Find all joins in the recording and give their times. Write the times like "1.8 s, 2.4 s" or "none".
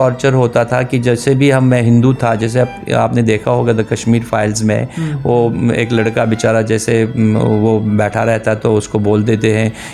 none